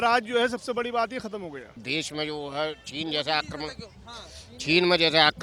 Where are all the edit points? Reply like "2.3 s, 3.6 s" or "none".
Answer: 1.8 s